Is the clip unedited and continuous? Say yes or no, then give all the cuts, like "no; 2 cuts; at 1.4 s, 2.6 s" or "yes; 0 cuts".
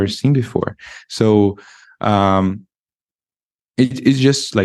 yes; 0 cuts